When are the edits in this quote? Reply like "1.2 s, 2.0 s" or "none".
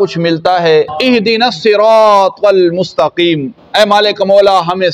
0.9 s